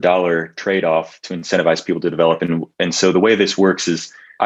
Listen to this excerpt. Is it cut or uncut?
uncut